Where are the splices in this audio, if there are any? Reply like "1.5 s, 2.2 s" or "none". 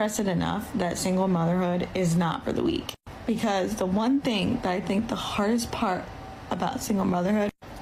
none